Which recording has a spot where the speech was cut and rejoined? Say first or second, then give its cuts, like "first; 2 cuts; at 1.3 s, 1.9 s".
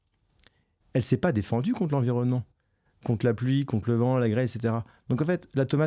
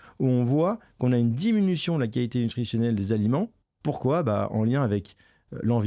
second; 1 cut; at 3.7 s